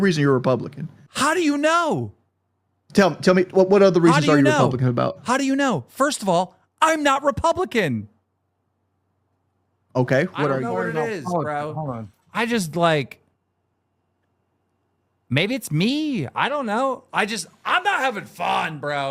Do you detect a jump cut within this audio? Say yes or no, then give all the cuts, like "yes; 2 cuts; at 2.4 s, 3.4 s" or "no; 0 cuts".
yes; 1 cut; at 10.6 s